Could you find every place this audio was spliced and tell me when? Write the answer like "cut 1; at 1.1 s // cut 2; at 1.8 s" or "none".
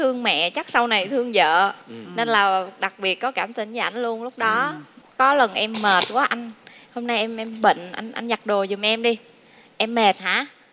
cut 1; at 5.0 s